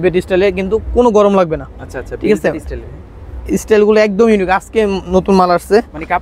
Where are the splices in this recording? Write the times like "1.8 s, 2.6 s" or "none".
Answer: none